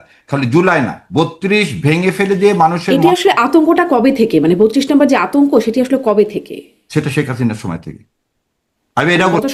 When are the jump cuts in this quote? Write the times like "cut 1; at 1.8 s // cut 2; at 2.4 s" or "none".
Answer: none